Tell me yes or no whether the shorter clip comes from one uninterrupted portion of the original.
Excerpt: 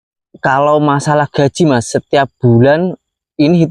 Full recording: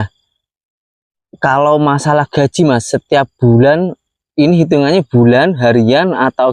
yes